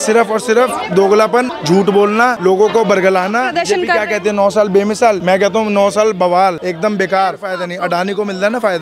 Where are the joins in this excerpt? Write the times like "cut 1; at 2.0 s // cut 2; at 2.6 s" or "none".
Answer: cut 1; at 1.6 s // cut 2; at 2.4 s // cut 3; at 3.5 s // cut 4; at 5.2 s // cut 5; at 6.6 s // cut 6; at 7.5 s